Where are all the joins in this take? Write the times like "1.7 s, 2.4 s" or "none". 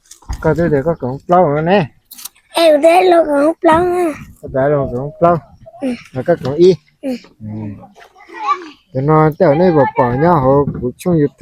none